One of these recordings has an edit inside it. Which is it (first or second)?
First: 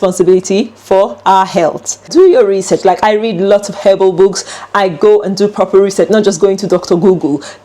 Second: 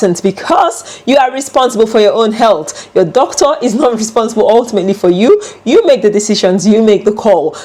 first